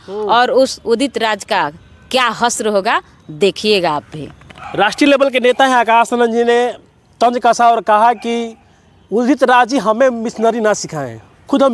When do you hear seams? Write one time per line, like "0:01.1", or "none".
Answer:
none